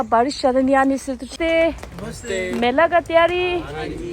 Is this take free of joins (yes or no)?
no